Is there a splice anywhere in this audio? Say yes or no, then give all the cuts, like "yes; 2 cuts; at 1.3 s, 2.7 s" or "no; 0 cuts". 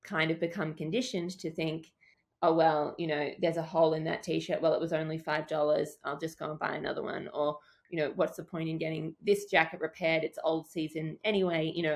no; 0 cuts